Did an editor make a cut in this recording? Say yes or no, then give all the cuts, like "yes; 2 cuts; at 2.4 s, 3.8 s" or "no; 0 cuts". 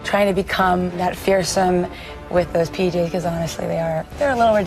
yes; 1 cut; at 1.0 s